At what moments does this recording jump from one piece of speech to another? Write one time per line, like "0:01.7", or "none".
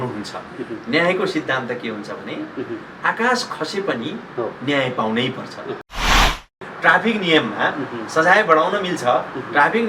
0:06.2

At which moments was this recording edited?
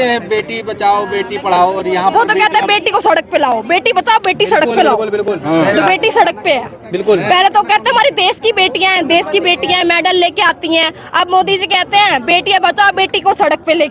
none

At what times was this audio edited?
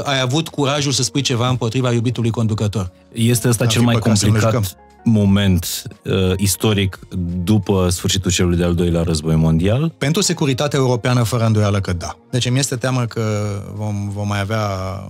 0:03.0
0:10.0
0:12.1

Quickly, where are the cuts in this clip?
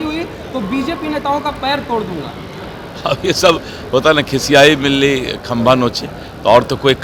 none

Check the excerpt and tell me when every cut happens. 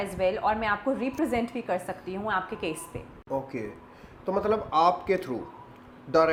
none

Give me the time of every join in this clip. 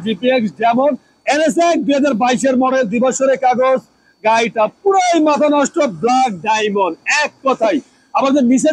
0:01.1

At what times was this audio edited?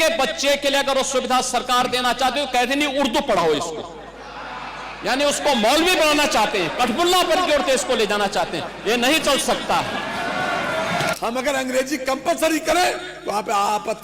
0:11.1

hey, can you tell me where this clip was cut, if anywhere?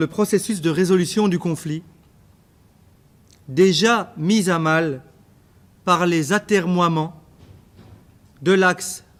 none

